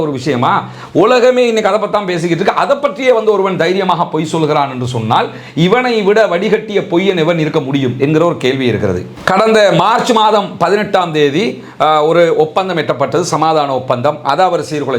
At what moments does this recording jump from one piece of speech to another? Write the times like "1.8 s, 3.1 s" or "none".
none